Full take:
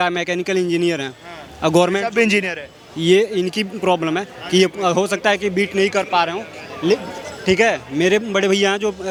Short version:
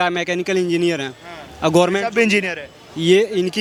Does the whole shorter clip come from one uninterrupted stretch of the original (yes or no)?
yes